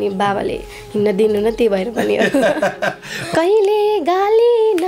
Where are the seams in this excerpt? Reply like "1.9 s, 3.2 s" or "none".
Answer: 3.1 s